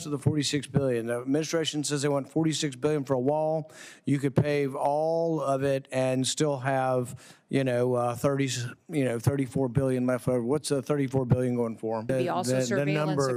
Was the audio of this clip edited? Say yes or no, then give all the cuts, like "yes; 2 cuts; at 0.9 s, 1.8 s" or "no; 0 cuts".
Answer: yes; 1 cut; at 12.1 s